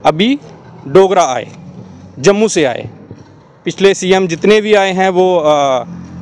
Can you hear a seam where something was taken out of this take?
no; 0 cuts

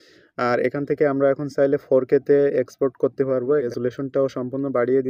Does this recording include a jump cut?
yes; 1 cut; at 3.7 s

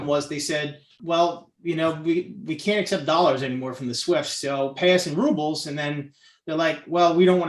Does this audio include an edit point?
yes; 1 cut; at 0.9 s

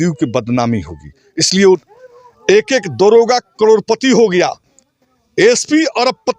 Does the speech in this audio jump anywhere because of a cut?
yes; 1 cut; at 1.9 s

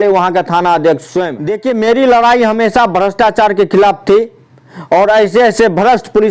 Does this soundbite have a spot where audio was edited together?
yes; 1 cut; at 1.5 s

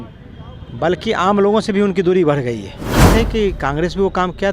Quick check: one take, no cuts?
no; 1 cut; at 3.1 s

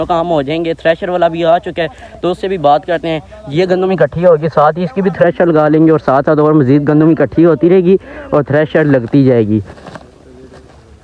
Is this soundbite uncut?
no; 1 cut; at 9.6 s

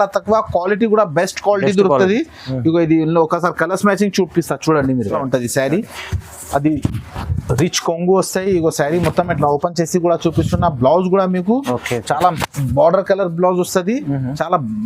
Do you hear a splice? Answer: yes; 1 cut; at 5.2 s

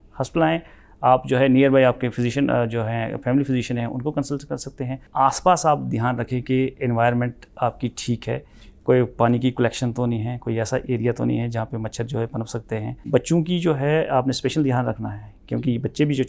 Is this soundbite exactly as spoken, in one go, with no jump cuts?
no; 2 cuts; at 5.0 s, 12.9 s

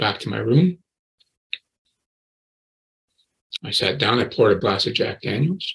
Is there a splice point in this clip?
yes; 1 cut; at 4.6 s

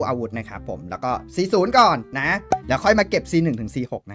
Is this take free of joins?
no; 1 cut; at 2.4 s

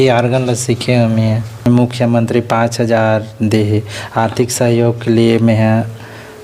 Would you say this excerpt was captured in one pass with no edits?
no; 1 cut; at 1.6 s

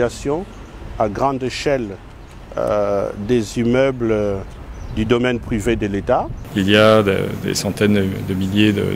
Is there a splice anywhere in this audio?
yes; 1 cut; at 6.4 s

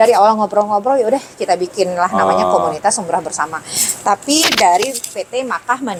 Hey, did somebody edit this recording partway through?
no; 0 cuts

